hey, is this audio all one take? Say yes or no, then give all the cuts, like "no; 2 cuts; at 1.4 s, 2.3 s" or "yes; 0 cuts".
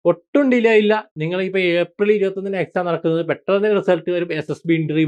yes; 0 cuts